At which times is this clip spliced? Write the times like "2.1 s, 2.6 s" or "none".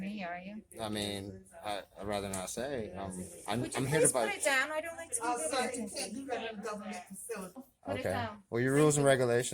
7.7 s